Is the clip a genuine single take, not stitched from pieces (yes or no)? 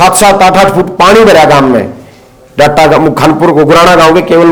yes